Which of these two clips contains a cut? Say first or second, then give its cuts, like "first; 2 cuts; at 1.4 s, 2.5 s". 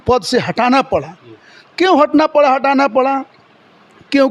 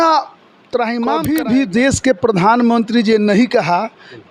second; 1 cut; at 1.2 s